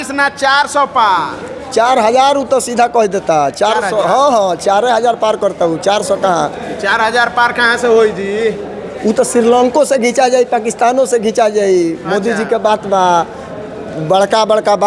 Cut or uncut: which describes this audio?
uncut